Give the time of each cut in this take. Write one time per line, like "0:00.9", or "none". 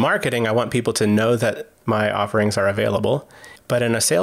0:01.7